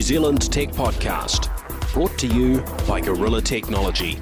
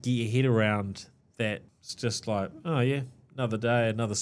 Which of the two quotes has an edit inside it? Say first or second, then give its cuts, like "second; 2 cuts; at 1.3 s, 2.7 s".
second; 1 cut; at 1.7 s